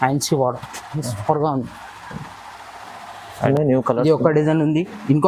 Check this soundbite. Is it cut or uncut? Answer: cut